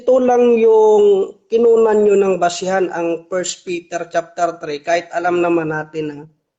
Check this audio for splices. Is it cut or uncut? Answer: uncut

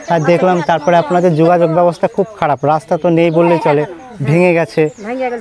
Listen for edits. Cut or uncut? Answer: uncut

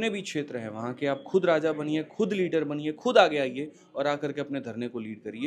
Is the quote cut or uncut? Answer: uncut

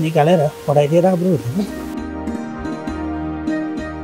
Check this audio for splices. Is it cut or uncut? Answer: uncut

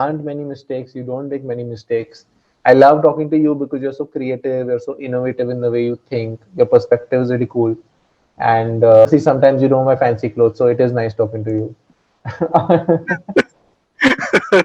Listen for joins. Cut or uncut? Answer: cut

